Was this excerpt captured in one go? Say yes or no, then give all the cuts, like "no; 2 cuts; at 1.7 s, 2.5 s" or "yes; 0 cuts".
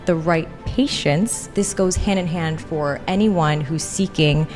no; 1 cut; at 1.4 s